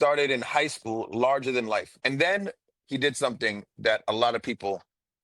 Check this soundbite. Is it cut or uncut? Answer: cut